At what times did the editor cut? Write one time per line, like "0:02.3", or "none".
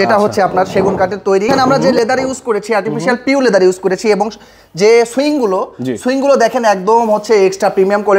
0:01.5

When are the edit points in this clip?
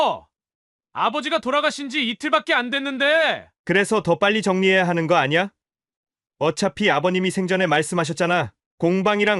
none

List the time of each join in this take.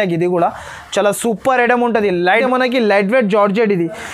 0:02.4

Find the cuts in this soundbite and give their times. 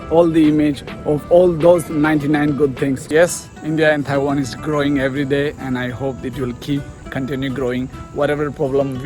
0:03.0

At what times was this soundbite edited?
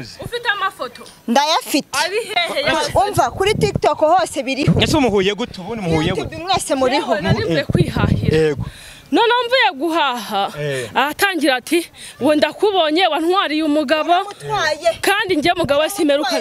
none

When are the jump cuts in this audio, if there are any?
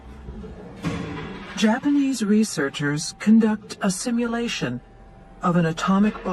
none

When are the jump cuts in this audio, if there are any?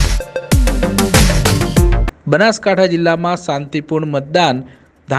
0:02.0

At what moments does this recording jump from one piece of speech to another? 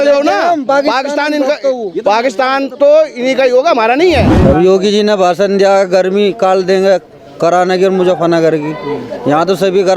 0:04.3

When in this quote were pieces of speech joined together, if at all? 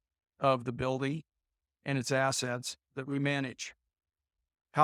none

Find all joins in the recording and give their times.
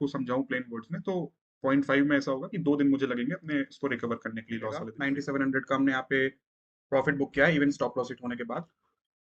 0:04.9

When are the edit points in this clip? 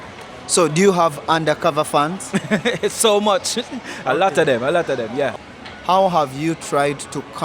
0:05.3

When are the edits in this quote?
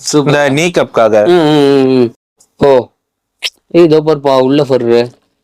0:02.4

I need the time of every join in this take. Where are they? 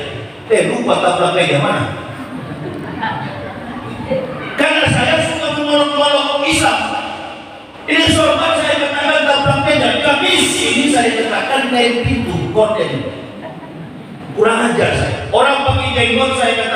none

